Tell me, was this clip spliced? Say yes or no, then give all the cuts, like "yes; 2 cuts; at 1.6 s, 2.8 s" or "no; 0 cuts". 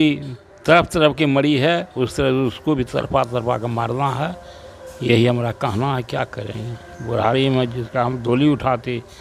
no; 0 cuts